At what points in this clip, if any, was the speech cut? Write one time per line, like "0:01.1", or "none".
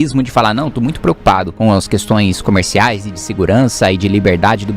0:01.5